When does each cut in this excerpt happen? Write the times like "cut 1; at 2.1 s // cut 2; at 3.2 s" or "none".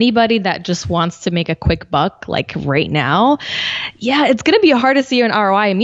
none